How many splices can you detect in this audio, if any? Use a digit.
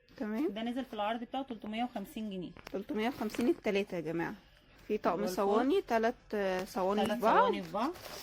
1